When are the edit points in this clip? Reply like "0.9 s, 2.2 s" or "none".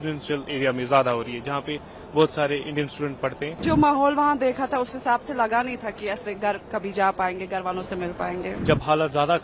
3.6 s, 8.6 s